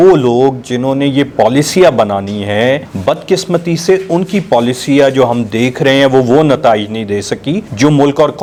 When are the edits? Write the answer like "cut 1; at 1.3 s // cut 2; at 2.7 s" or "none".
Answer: none

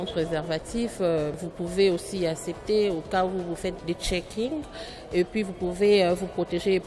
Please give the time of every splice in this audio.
cut 1; at 1.3 s // cut 2; at 3.8 s

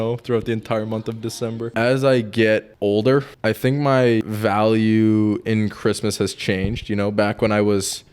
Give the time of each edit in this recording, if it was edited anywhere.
cut 1; at 1.7 s // cut 2; at 2.7 s // cut 3; at 3.3 s // cut 4; at 4.2 s

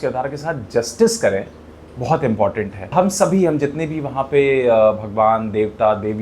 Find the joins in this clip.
cut 1; at 2.9 s

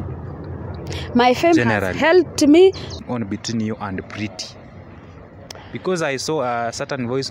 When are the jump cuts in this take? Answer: cut 1; at 2.9 s

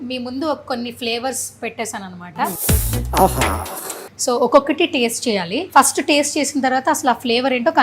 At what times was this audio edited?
cut 1; at 2.6 s // cut 2; at 4.1 s // cut 3; at 5.6 s

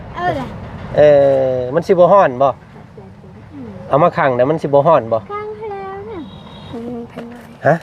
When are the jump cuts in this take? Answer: cut 1; at 6.7 s

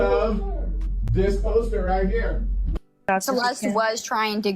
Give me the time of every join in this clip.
cut 1; at 3.0 s

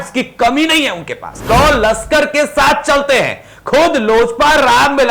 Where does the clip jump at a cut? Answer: cut 1; at 1.5 s

